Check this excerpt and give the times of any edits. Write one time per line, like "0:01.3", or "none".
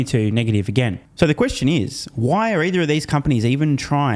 0:01.0